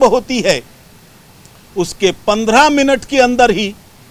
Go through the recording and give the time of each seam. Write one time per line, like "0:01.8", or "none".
none